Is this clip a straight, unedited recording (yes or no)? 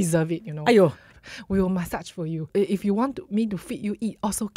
no